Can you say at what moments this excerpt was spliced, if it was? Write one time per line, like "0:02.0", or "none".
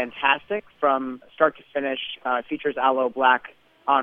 0:01.3